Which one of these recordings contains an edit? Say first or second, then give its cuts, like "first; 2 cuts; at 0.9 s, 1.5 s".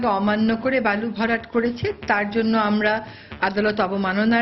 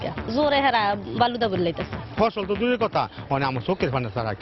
second; 1 cut; at 2.0 s